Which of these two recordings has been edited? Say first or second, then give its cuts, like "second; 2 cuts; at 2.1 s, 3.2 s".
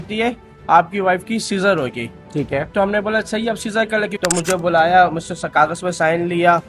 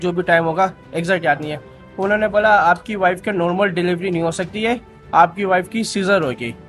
first; 1 cut; at 4.2 s